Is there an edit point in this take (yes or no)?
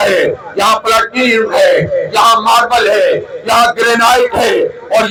no